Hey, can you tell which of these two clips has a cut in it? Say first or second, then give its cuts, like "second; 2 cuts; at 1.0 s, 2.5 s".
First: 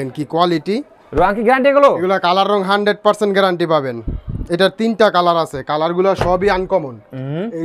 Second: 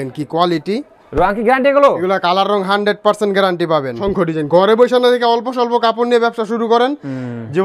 second; 1 cut; at 4.0 s